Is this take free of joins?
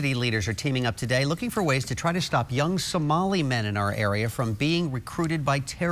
yes; 0 cuts

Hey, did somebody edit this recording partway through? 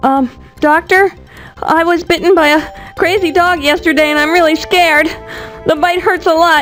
no; 0 cuts

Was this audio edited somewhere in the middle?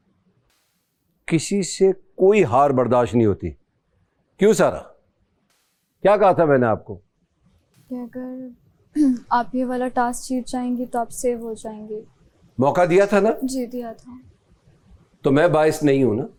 no; 0 cuts

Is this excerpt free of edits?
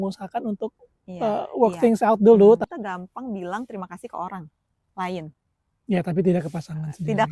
no; 1 cut; at 2.7 s

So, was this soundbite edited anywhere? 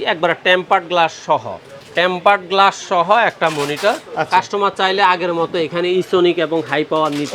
no; 0 cuts

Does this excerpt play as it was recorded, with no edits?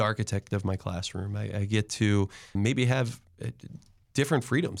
yes; 0 cuts

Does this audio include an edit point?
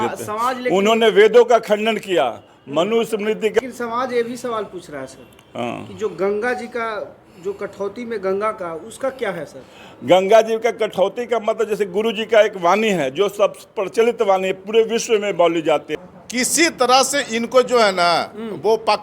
yes; 2 cuts; at 3.6 s, 16.0 s

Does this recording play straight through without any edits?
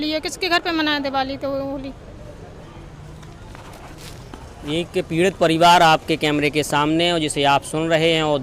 yes; 0 cuts

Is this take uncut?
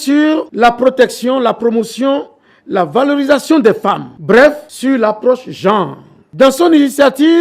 no; 1 cut; at 6.4 s

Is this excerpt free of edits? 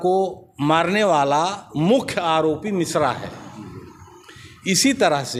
yes; 0 cuts

